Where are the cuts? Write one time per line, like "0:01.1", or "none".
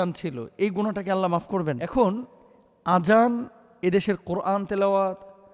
0:01.8